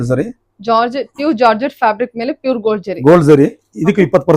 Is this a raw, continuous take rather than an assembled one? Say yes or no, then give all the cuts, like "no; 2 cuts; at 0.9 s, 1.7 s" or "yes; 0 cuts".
yes; 0 cuts